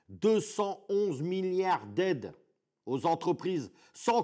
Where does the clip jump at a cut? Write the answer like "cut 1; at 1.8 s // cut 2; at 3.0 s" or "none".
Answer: none